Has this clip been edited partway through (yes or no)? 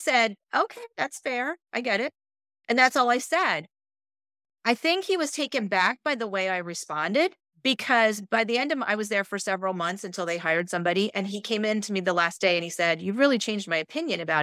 no